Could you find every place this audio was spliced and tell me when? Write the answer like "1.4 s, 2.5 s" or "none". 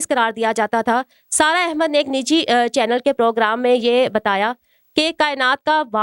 none